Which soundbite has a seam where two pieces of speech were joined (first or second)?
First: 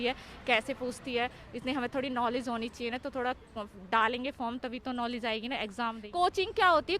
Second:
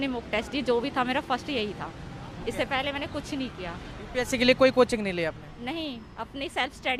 first